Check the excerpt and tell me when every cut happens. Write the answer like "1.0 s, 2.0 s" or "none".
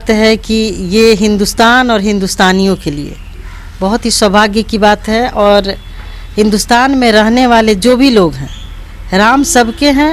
none